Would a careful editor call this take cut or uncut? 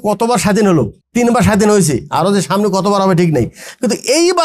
cut